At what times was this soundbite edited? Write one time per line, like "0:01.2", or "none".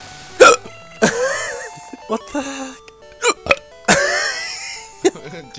0:01.9